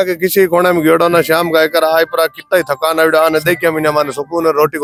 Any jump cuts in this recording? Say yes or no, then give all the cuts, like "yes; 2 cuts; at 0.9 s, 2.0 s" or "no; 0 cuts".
no; 0 cuts